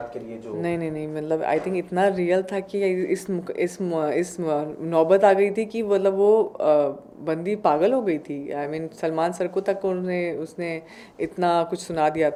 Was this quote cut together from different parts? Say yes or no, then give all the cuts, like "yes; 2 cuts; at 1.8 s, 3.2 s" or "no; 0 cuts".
no; 0 cuts